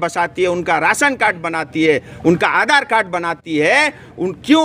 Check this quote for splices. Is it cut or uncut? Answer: uncut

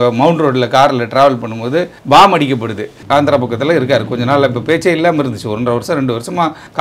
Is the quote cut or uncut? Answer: cut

